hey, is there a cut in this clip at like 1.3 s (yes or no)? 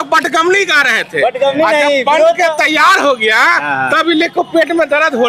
no